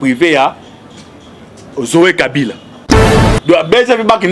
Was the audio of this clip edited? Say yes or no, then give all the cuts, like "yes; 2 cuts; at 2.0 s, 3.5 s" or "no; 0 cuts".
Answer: yes; 1 cut; at 3.1 s